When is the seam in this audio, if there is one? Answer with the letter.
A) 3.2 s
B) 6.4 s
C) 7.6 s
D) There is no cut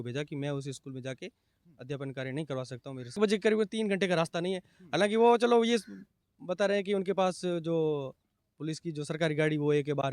A